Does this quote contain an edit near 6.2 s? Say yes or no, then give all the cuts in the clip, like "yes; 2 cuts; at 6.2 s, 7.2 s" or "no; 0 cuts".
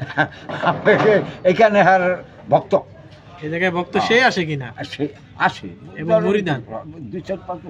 no; 0 cuts